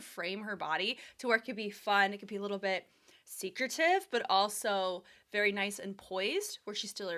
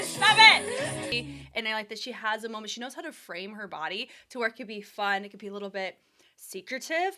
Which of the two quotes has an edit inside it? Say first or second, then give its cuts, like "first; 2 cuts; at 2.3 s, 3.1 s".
second; 1 cut; at 1.1 s